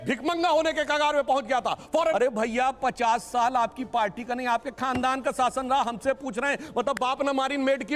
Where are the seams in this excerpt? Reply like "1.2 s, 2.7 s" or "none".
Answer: 2.1 s

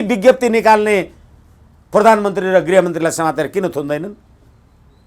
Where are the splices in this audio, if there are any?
none

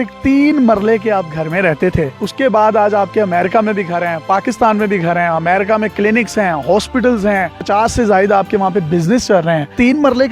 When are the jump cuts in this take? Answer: none

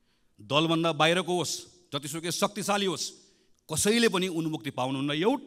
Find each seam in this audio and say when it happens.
none

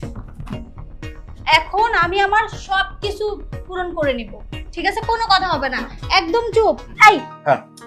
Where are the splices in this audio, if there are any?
6.9 s

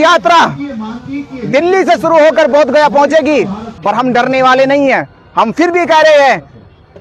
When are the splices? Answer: 3.7 s

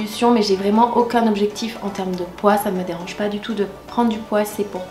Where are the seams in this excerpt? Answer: none

